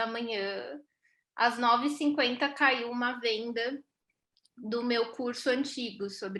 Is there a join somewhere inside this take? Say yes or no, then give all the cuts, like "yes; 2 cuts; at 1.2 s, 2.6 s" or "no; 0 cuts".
no; 0 cuts